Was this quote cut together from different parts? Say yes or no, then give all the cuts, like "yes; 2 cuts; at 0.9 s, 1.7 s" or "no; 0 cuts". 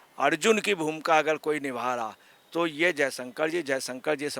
no; 0 cuts